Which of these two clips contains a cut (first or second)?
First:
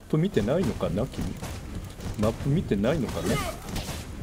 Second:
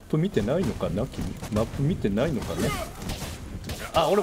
second